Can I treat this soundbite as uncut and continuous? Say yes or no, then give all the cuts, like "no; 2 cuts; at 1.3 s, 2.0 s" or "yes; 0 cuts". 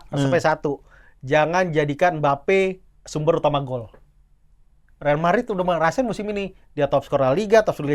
yes; 0 cuts